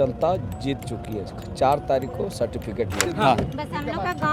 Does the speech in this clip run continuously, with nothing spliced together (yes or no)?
no